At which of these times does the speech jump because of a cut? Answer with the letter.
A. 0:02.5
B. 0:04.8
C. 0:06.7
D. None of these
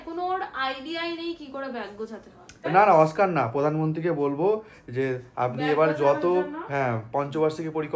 A